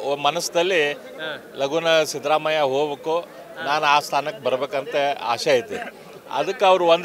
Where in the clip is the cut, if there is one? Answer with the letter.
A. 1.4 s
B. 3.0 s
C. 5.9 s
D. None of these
D